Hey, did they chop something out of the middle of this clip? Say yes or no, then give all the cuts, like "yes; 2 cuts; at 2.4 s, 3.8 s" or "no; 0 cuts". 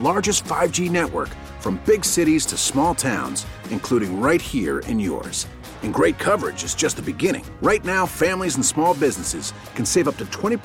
no; 0 cuts